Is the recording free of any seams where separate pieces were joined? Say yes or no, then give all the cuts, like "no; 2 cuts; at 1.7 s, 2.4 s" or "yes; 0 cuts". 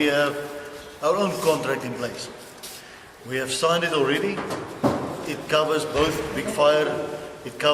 yes; 0 cuts